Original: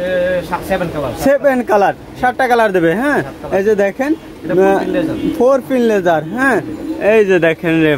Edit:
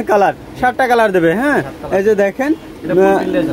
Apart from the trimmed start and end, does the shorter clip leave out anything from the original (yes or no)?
no